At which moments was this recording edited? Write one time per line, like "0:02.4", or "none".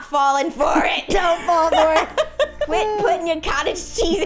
0:02.6